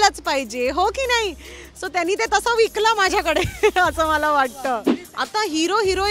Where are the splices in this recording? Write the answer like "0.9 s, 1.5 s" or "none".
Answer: 5.0 s